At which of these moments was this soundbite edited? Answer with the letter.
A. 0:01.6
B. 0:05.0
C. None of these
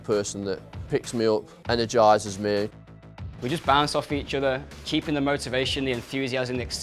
C